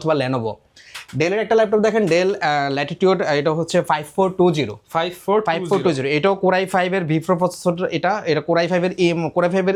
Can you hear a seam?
no; 0 cuts

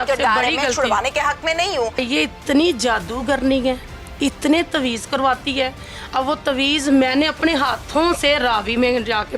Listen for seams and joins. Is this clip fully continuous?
no; 1 cut; at 2.0 s

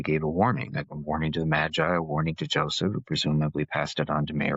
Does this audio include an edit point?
no; 0 cuts

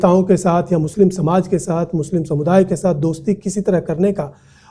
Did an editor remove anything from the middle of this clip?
no; 0 cuts

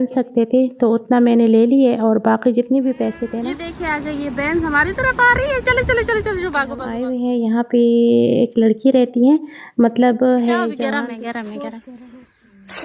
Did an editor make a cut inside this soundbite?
yes; 3 cuts; at 3.4 s, 7.0 s, 10.8 s

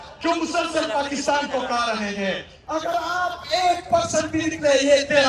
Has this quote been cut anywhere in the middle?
yes; 1 cut; at 2.5 s

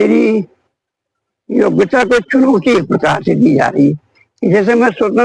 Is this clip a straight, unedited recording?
yes; 0 cuts

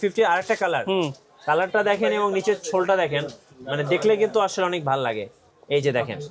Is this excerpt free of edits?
yes; 0 cuts

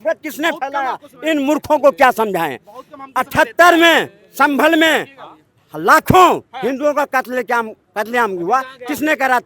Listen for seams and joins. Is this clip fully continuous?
yes; 0 cuts

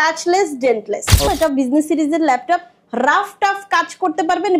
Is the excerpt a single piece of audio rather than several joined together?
no; 1 cut; at 1.3 s

